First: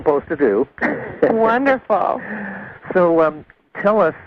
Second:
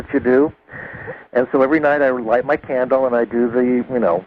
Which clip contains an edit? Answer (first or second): second